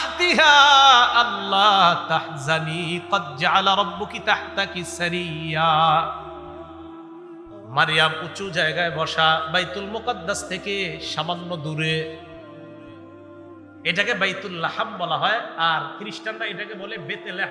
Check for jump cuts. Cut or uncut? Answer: uncut